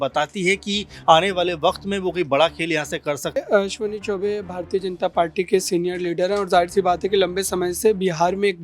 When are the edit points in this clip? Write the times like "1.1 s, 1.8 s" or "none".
3.4 s